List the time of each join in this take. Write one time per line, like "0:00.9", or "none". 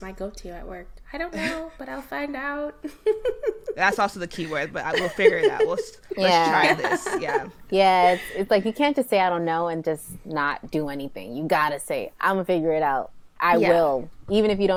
none